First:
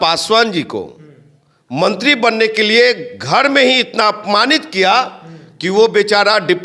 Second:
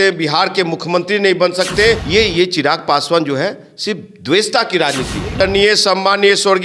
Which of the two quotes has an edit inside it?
second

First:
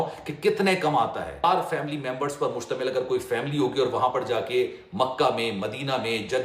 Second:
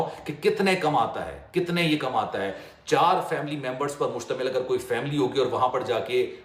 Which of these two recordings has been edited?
first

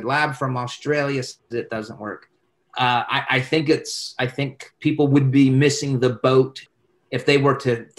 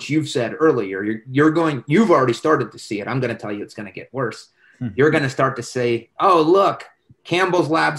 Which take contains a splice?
first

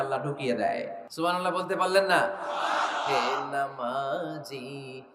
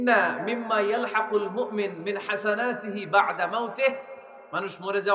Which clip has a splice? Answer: first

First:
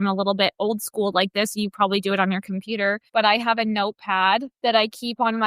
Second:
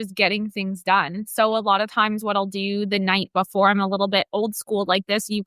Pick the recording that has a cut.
first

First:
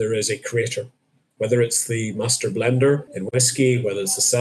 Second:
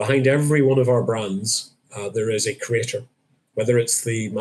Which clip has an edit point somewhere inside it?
first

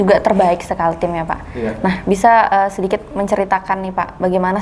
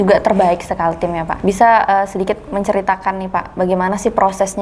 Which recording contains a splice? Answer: second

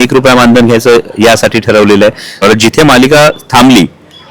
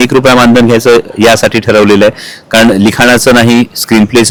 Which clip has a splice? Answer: first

